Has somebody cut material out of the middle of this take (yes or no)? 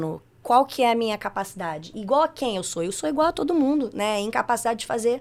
no